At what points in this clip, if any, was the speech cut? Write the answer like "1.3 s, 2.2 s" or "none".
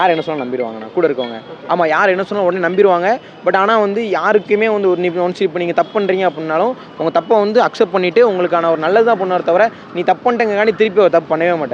none